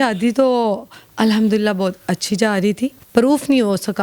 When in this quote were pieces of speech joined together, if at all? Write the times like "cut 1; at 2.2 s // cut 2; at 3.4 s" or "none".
cut 1; at 3.0 s